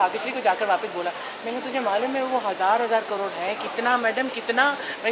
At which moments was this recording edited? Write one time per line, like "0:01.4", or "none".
none